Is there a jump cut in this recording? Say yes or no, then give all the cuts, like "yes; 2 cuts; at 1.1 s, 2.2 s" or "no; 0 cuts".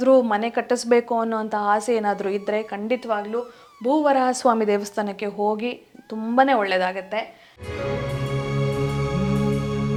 no; 0 cuts